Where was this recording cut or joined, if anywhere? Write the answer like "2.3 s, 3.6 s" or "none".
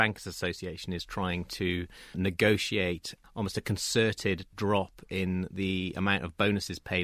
3.1 s